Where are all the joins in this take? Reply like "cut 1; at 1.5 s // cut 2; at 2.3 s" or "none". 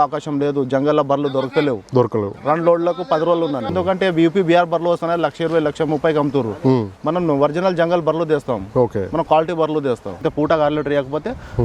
cut 1; at 3.7 s // cut 2; at 10.3 s